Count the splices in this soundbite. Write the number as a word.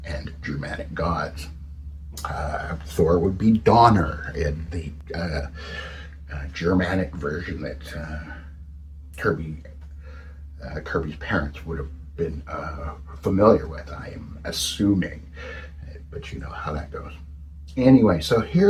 zero